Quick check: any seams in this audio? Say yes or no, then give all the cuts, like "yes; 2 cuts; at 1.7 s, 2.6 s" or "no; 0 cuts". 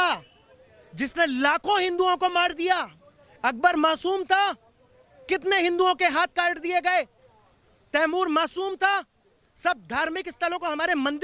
no; 0 cuts